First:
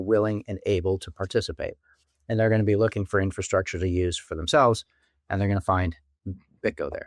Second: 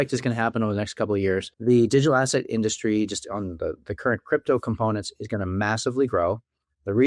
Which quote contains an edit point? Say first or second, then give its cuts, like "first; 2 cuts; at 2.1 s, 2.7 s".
second; 1 cut; at 1.5 s